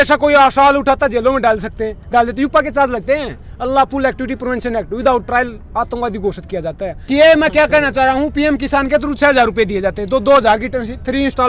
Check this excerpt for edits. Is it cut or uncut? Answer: cut